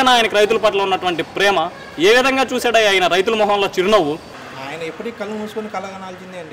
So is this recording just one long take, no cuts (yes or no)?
no